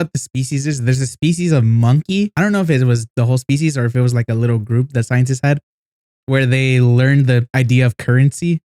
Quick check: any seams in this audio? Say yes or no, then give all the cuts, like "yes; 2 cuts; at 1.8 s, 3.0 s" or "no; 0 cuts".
yes; 3 cuts; at 2.3 s, 3.0 s, 7.5 s